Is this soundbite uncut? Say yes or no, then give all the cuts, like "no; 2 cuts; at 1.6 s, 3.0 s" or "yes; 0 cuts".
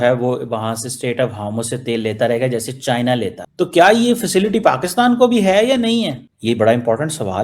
no; 1 cut; at 6.3 s